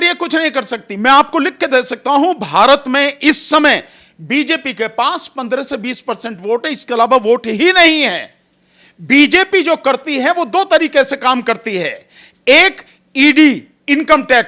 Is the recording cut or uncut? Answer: uncut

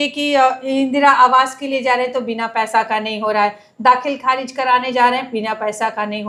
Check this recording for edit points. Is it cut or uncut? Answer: uncut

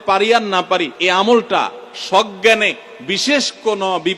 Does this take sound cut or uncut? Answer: cut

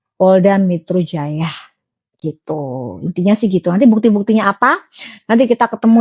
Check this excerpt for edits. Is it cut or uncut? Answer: uncut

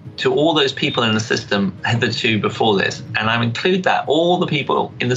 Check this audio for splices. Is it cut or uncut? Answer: uncut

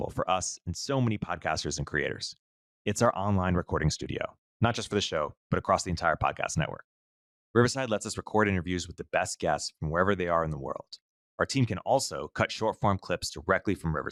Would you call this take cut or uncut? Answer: uncut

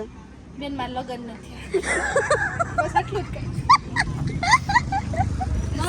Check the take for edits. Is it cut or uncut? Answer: uncut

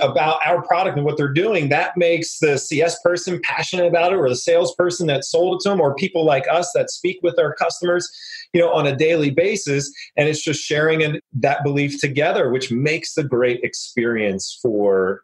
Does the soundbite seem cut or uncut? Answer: cut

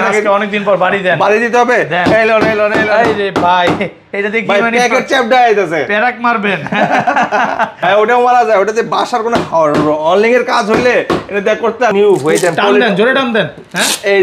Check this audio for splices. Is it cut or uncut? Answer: cut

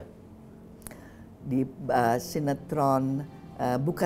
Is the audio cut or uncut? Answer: uncut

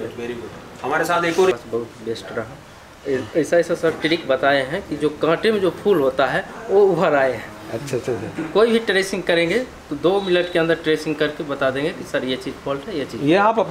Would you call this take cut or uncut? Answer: cut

